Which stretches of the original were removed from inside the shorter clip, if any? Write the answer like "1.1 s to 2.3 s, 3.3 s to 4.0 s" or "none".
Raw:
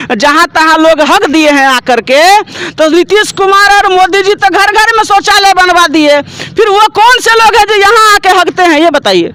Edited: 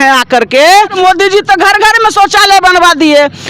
2.5 s to 3.9 s